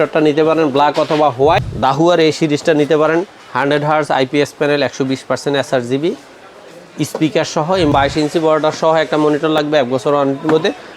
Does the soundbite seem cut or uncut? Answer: cut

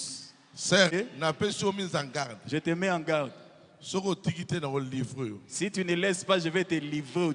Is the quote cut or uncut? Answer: cut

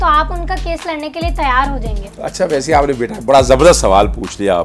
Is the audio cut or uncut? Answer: uncut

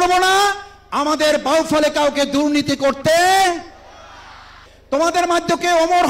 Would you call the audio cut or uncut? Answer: cut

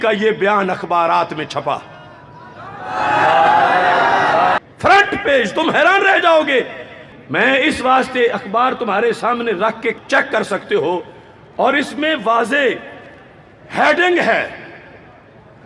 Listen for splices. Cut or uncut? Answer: cut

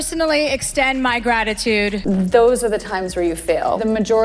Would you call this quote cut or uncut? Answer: cut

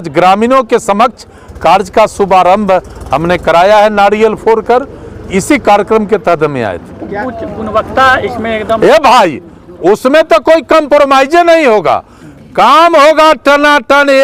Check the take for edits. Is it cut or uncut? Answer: uncut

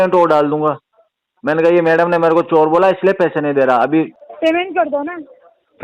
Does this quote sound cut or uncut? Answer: cut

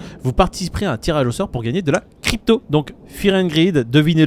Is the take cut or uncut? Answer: cut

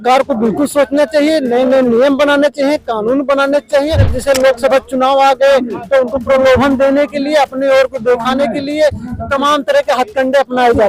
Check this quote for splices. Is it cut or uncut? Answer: cut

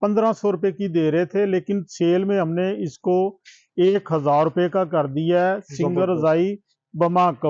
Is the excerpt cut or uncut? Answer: uncut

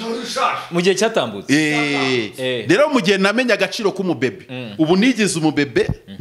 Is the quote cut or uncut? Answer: uncut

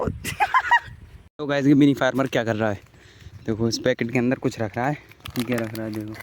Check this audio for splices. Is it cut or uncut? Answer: cut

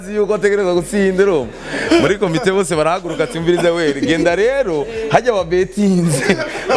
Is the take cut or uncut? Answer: uncut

